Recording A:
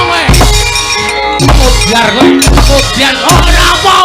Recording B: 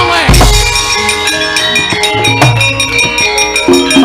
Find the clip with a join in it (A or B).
A